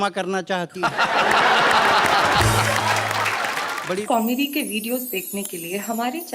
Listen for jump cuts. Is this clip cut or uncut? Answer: cut